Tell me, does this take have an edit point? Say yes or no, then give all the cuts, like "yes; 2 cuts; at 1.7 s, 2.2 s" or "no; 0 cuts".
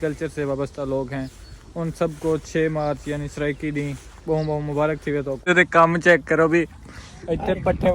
yes; 1 cut; at 5.8 s